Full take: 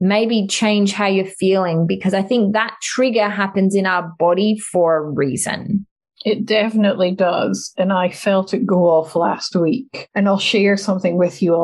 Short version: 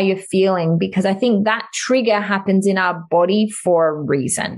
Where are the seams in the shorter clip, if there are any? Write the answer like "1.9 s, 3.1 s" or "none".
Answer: none